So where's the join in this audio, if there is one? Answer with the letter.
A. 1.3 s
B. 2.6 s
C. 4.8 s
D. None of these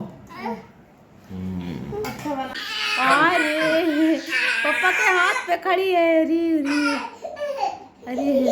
B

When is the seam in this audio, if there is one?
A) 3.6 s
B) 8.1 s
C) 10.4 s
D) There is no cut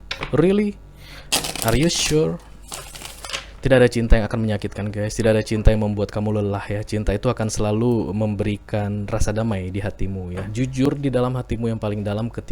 C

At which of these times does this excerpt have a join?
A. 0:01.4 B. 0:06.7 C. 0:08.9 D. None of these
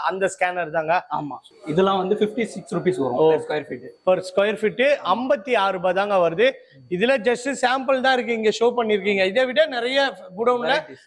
A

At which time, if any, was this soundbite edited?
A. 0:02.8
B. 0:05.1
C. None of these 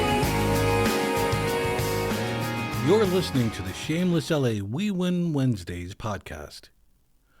A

